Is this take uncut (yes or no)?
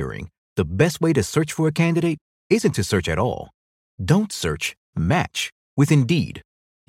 yes